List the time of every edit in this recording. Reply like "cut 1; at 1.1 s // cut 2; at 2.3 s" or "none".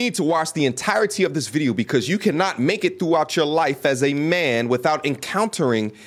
none